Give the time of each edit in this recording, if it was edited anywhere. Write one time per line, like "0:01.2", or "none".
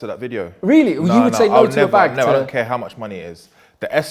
none

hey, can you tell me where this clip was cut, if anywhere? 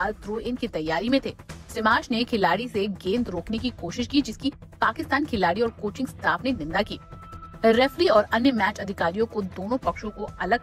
none

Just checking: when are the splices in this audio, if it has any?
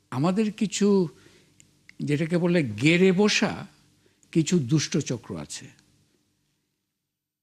none

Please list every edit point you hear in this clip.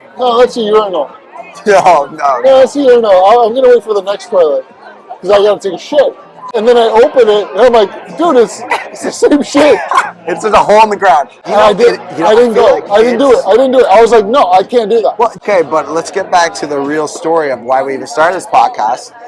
0:06.5
0:11.4
0:15.4

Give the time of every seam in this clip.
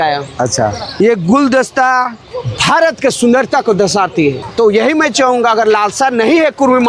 0:04.4

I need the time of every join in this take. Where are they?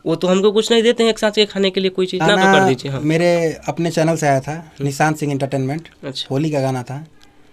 0:02.2

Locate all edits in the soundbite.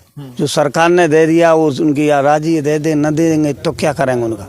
0:01.4

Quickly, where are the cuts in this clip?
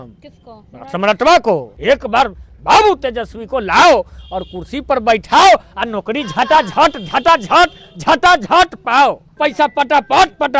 0:01.7
0:09.4

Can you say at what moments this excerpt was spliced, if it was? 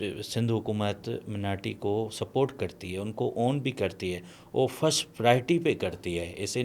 none

